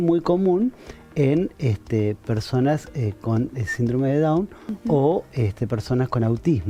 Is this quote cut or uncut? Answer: uncut